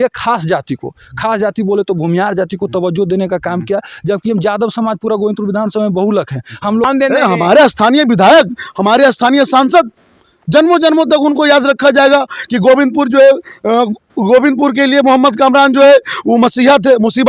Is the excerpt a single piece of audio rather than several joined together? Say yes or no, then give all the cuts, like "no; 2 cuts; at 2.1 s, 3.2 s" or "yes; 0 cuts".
no; 1 cut; at 6.9 s